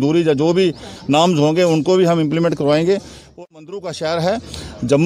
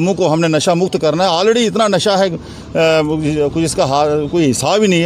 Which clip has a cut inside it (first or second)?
first